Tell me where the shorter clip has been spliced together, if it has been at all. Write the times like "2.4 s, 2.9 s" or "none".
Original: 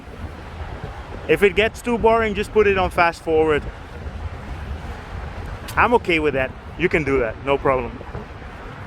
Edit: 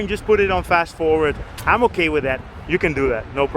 1.5 s